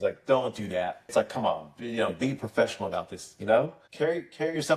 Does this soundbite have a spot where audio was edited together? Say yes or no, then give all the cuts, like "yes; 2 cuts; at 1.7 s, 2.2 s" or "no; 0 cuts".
yes; 1 cut; at 1.1 s